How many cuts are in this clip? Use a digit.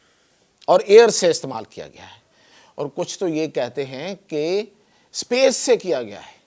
0